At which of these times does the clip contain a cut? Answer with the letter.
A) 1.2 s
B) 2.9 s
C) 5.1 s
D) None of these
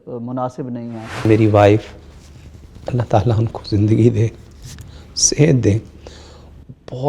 A